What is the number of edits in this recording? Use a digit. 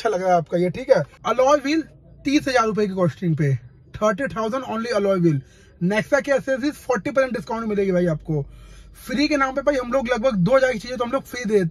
1